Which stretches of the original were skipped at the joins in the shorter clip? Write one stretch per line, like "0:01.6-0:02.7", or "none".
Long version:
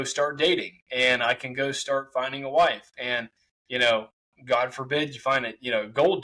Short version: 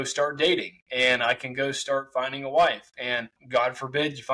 0:03.3-0:04.3

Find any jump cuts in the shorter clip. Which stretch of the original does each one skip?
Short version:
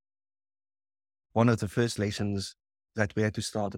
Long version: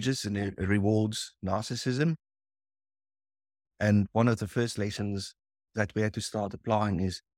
0:03.7-0:04.1

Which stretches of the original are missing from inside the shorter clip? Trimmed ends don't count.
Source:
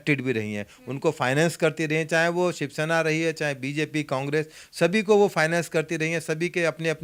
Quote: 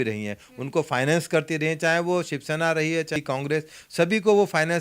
0:03.4-0:04.0

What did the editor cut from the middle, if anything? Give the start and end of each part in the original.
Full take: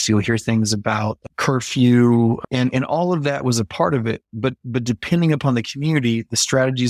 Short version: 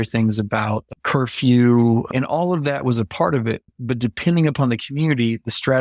0:02.5-0:02.7
0:04.3-0:04.6

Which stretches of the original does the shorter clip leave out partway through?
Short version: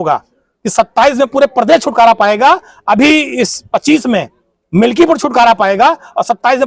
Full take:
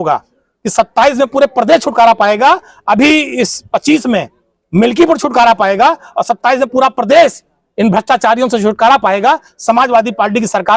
none

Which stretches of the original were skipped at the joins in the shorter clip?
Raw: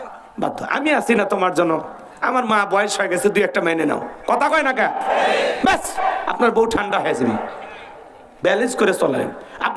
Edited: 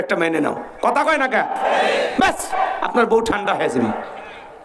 none

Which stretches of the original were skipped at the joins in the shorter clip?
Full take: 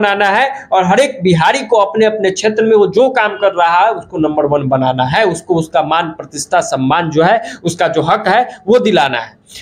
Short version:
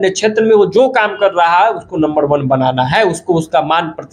none

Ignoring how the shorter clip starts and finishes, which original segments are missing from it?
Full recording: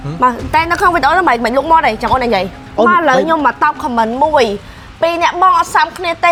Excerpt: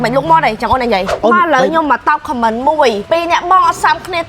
0:02.5-0:02.6
0:04.6-0:04.9

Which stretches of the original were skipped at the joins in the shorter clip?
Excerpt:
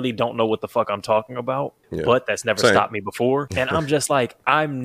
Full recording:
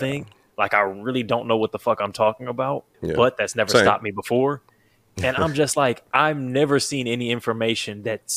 0:04.6-0:05.2

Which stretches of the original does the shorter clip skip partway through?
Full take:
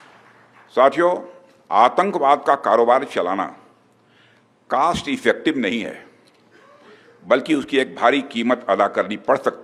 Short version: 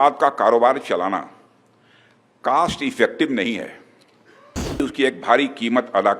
0:07.1-0:07.5

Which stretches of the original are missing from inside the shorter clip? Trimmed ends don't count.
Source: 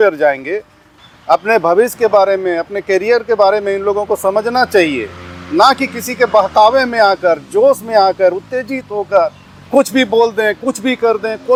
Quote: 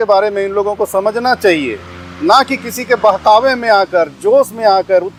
none

